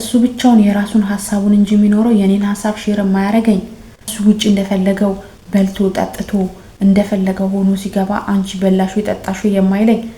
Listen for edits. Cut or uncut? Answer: cut